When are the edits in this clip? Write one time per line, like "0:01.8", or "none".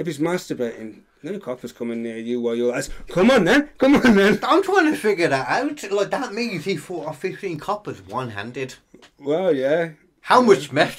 none